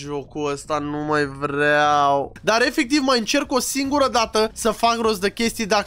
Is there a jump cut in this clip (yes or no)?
yes